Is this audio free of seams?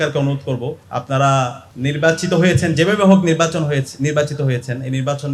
no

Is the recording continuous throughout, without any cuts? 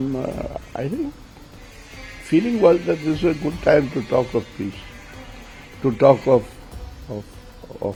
yes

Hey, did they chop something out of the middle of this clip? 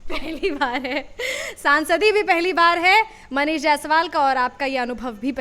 no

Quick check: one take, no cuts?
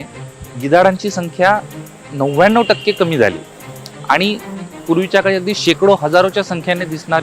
yes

